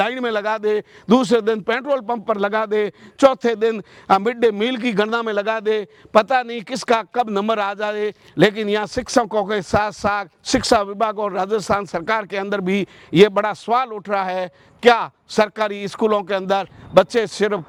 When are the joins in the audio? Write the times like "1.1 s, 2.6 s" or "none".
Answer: none